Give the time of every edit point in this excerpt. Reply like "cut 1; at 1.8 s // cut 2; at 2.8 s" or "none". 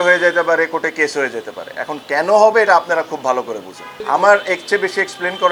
none